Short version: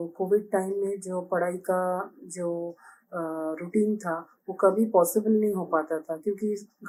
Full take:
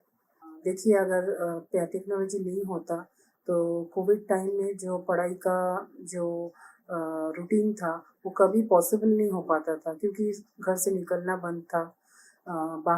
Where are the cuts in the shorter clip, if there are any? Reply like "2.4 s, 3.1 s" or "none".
none